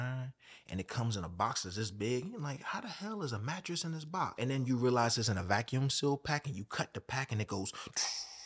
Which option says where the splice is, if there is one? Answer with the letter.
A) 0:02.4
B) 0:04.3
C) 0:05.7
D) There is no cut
B